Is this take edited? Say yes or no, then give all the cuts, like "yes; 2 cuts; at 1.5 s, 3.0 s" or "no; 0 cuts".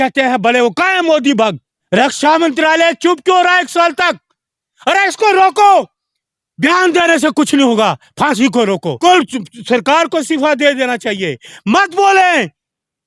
yes; 2 cuts; at 1.7 s, 9.0 s